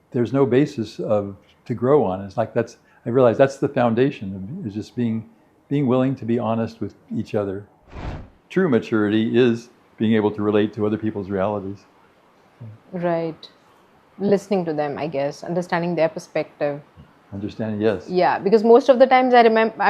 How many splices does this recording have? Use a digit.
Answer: 1